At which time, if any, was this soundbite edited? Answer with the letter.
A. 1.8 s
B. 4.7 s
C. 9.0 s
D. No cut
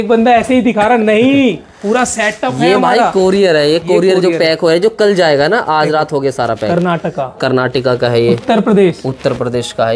D